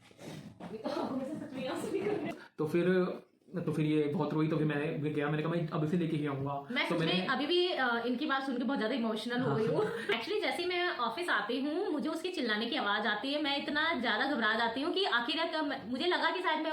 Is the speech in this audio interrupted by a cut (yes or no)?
yes